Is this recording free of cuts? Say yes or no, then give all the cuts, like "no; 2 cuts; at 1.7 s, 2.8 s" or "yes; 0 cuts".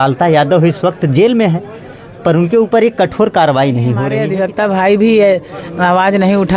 no; 1 cut; at 4.1 s